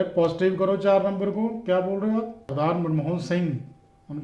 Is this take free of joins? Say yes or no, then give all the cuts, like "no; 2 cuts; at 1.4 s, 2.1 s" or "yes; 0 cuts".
no; 1 cut; at 2.4 s